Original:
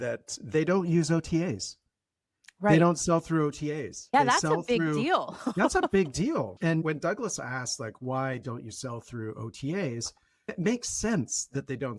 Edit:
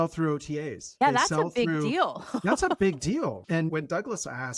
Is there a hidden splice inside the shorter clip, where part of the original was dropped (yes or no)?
no